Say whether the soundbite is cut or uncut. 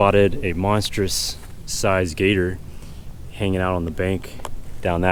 uncut